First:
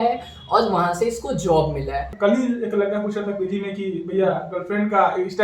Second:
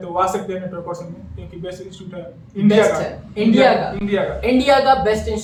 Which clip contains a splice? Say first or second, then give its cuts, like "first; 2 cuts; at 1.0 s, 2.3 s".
first; 1 cut; at 2.1 s